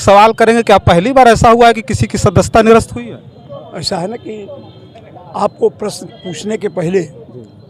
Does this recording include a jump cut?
no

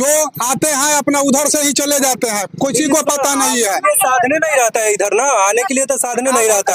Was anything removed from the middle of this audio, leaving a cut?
no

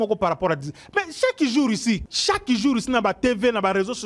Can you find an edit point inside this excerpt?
yes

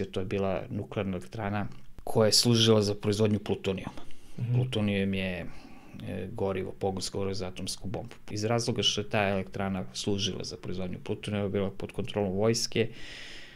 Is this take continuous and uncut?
no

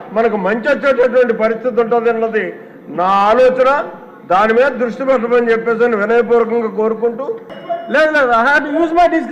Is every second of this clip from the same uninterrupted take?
no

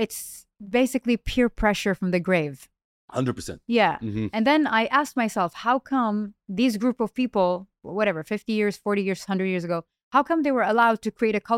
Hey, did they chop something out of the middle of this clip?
no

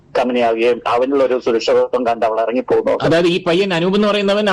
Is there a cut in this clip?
no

